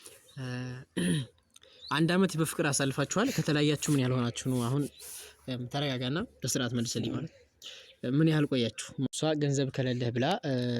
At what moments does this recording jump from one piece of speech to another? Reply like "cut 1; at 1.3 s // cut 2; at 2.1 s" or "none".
cut 1; at 9.1 s